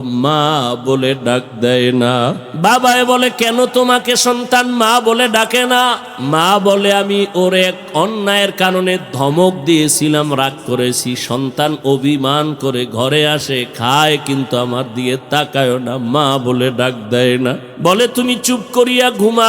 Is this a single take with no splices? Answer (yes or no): no